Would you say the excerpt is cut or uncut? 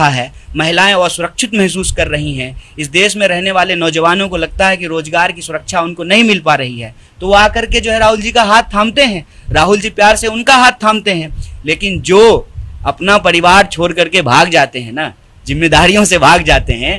uncut